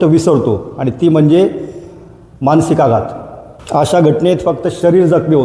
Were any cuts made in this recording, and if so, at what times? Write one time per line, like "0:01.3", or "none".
none

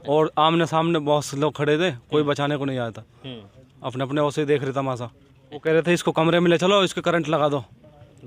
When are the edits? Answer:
0:05.6

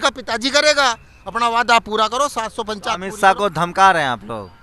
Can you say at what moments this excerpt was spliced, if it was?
none

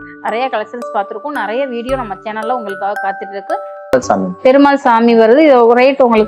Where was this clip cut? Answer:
0:03.9

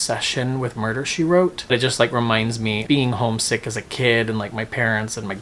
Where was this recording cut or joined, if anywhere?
0:01.6
0:02.8

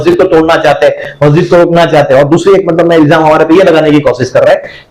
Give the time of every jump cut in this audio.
none

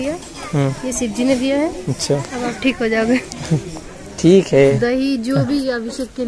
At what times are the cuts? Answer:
0:04.8

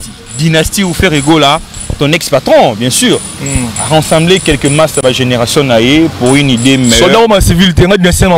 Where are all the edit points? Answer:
none

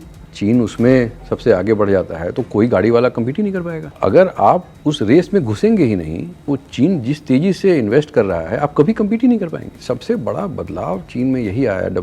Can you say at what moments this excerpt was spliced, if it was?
0:03.8
0:04.7
0:09.8

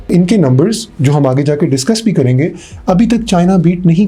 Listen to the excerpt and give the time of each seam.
none

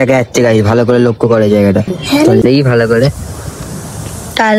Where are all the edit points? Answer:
0:02.4

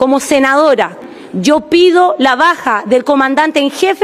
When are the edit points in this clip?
0:01.0

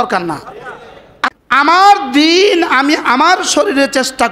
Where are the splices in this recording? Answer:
0:01.3

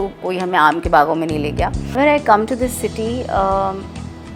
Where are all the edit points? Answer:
0:01.9

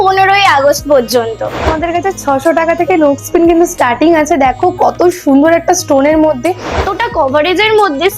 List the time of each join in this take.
0:01.7
0:06.8

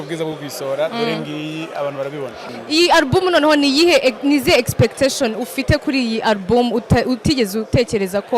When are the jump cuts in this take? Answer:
0:02.4

